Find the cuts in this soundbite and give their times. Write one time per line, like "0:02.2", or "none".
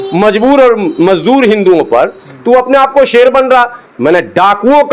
0:03.8